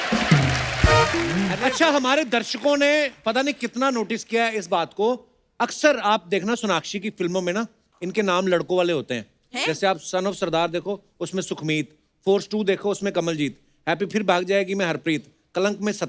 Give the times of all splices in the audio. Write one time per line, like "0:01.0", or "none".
0:01.6